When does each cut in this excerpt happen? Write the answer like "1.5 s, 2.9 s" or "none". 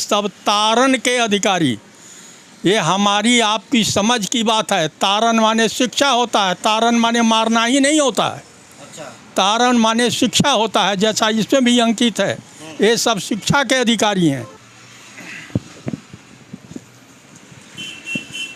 none